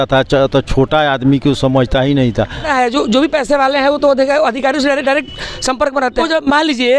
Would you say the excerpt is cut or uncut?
cut